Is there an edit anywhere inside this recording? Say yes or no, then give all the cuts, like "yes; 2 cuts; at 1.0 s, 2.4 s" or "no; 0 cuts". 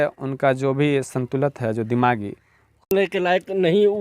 yes; 1 cut; at 2.9 s